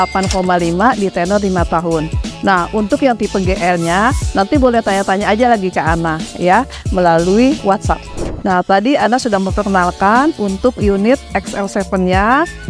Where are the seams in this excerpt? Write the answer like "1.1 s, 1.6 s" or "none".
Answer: none